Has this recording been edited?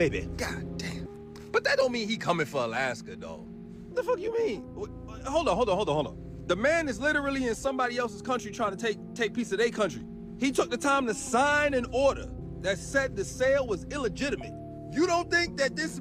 no; 0 cuts

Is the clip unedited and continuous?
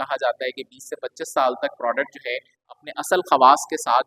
yes; 0 cuts

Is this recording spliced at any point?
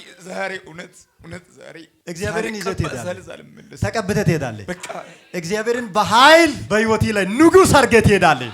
yes; 1 cut; at 1.9 s

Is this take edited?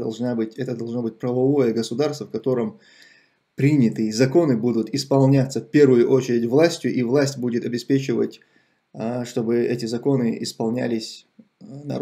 no; 0 cuts

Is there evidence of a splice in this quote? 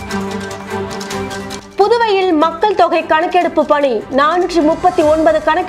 yes; 1 cut; at 1.2 s

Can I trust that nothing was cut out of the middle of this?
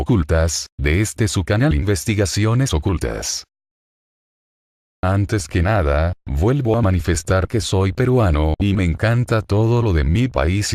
no; 1 cut; at 6.4 s

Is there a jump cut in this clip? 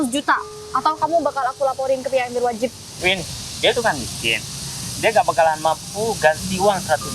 yes; 1 cut; at 2.9 s

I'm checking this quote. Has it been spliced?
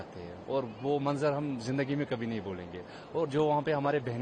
no; 0 cuts

